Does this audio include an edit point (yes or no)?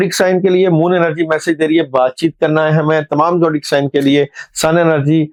no